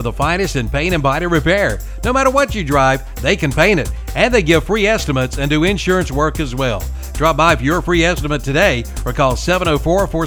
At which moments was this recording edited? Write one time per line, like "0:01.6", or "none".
none

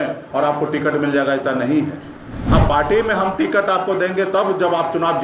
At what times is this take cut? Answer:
none

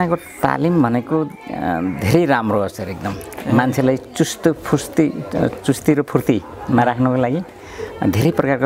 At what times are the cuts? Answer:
none

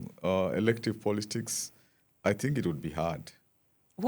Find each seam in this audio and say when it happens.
none

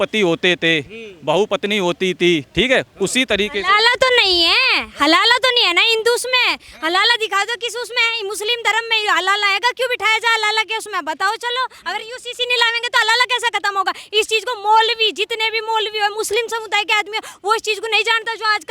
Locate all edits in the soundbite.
0:02.5

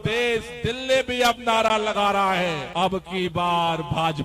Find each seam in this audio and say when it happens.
0:02.6

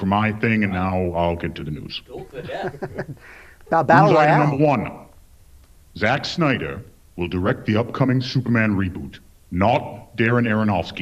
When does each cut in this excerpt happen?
0:04.9

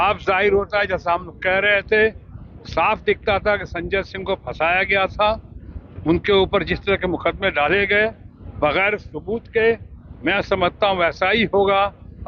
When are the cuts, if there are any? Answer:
none

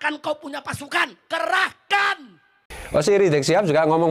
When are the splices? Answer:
0:02.8

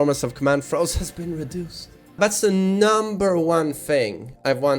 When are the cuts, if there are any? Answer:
0:02.2

